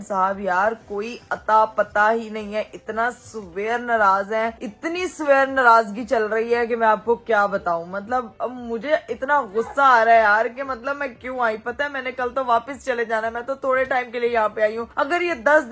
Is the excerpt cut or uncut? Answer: uncut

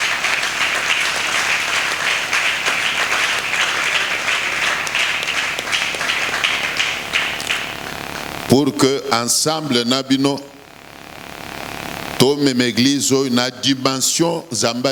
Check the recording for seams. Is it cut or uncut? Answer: uncut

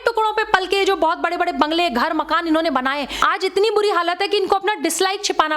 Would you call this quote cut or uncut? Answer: cut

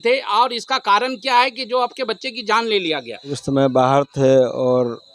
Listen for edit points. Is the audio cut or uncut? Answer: cut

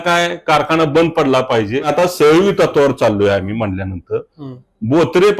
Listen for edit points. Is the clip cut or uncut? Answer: cut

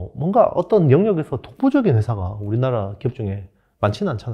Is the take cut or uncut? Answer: uncut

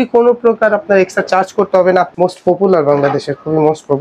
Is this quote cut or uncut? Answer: cut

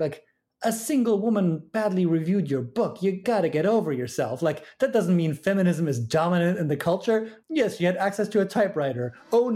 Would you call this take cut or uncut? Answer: cut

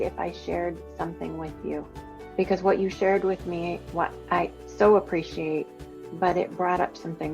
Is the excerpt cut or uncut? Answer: cut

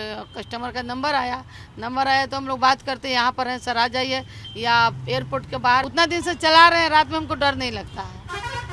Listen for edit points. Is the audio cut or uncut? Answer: cut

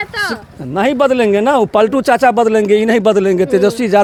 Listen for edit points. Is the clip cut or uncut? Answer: uncut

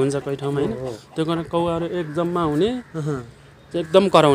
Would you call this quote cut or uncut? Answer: uncut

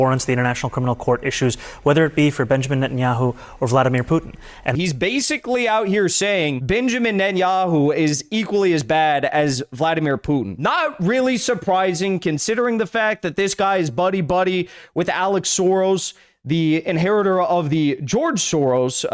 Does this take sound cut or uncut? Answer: cut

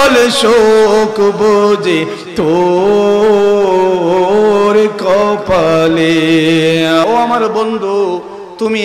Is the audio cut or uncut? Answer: cut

